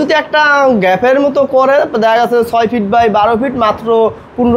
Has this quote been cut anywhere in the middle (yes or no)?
no